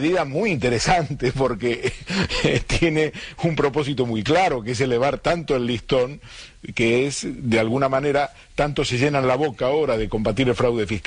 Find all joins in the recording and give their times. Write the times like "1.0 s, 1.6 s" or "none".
7.9 s